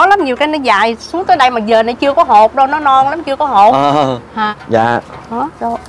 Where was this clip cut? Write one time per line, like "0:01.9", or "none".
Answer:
0:04.5